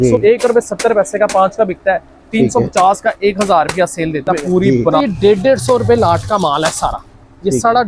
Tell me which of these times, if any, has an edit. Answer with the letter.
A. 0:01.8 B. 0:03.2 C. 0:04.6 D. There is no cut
C